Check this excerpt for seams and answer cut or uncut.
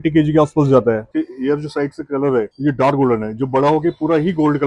cut